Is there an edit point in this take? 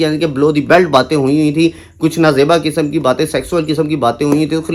no; 0 cuts

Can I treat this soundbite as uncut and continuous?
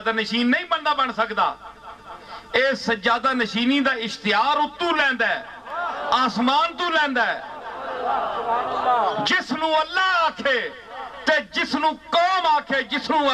yes; 0 cuts

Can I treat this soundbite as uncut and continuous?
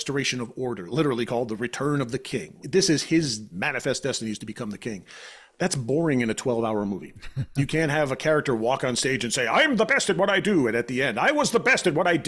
no; 3 cuts; at 0.9 s, 2.6 s, 3.5 s

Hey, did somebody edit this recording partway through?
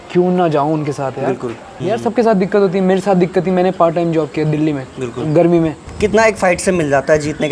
yes; 2 cuts; at 1.8 s, 5.8 s

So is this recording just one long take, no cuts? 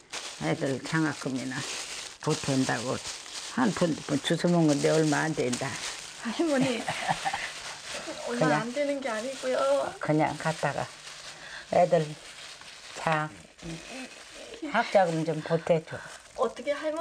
yes; 0 cuts

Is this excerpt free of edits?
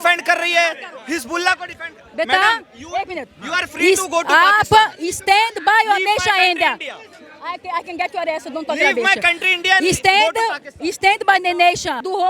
yes; 0 cuts

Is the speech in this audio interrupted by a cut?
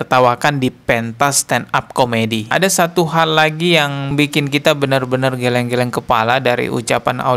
yes; 1 cut; at 2.5 s

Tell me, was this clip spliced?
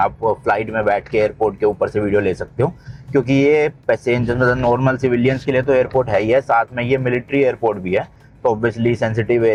no; 0 cuts

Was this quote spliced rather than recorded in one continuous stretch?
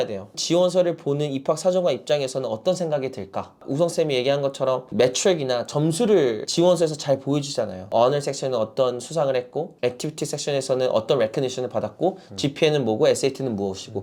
no; 0 cuts

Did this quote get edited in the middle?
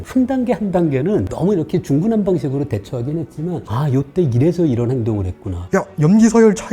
yes; 1 cut; at 5.6 s

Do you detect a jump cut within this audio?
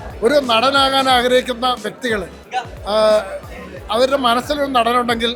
no; 0 cuts

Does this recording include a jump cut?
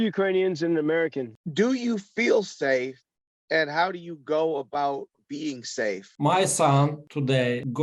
yes; 2 cuts; at 1.3 s, 6.1 s

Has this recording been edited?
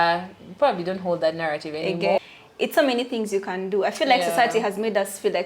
yes; 1 cut; at 2.2 s

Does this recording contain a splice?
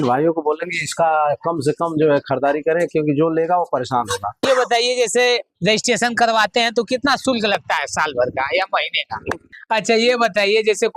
yes; 2 cuts; at 4.5 s, 9.6 s

